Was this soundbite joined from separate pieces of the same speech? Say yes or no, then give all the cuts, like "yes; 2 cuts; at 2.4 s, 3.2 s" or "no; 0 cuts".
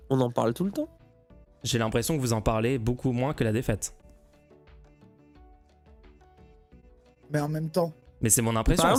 no; 0 cuts